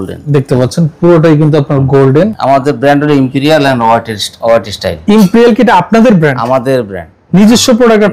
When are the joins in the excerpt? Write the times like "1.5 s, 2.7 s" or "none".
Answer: 2.4 s